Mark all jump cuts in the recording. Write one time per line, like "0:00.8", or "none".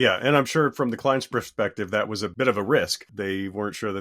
0:02.3
0:03.1